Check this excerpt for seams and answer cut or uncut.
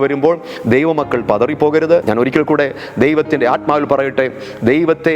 cut